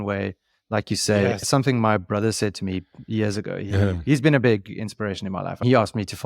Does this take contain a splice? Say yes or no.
yes